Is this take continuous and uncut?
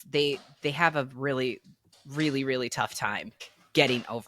no; 1 cut; at 3.4 s

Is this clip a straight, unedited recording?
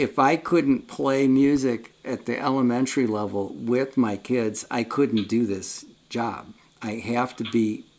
yes; 0 cuts

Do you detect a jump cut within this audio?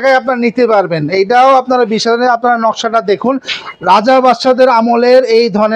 no; 0 cuts

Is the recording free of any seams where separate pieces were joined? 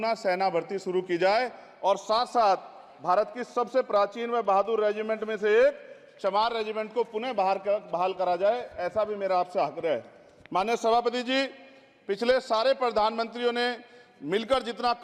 yes; 0 cuts

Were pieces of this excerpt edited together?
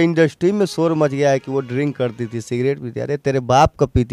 no; 0 cuts

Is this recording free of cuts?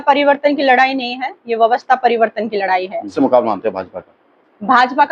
no; 1 cut; at 3.0 s

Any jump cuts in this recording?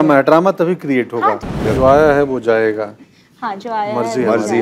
yes; 1 cut; at 1.5 s

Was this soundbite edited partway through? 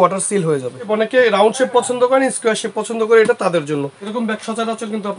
yes; 2 cuts; at 0.9 s, 4.0 s

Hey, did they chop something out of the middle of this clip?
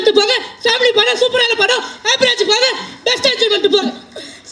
no; 0 cuts

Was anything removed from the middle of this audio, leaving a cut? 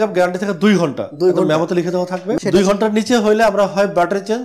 yes; 1 cut; at 2.3 s

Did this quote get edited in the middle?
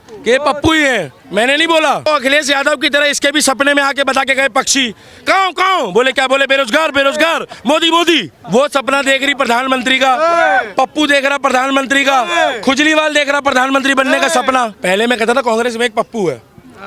yes; 3 cuts; at 2.1 s, 8.4 s, 14.8 s

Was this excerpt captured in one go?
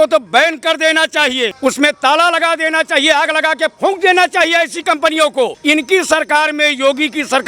no; 2 cuts; at 1.6 s, 5.6 s

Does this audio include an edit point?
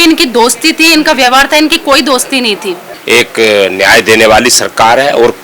yes; 1 cut; at 2.9 s

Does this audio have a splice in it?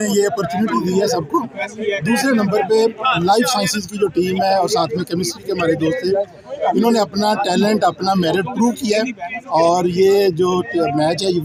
no; 0 cuts

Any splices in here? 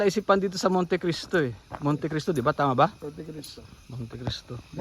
no; 0 cuts

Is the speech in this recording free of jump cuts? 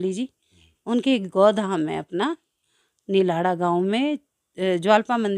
yes; 0 cuts

